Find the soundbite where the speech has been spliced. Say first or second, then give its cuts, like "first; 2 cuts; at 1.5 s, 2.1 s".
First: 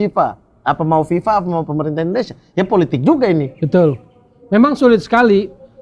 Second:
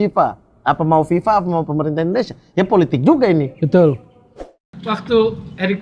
second; 1 cut; at 4.5 s